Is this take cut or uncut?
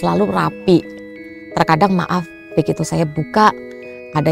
uncut